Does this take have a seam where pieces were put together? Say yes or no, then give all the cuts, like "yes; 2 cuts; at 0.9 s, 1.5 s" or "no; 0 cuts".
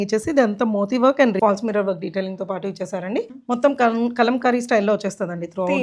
yes; 2 cuts; at 1.4 s, 3.4 s